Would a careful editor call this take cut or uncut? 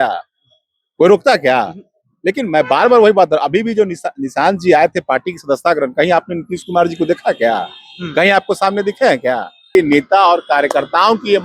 cut